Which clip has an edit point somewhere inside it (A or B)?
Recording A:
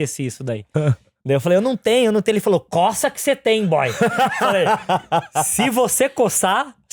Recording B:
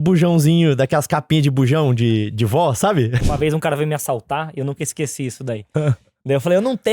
B